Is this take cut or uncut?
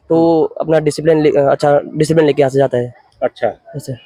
uncut